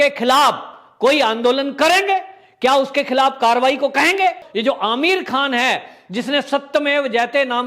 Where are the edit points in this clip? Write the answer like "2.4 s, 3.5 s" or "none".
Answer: 4.5 s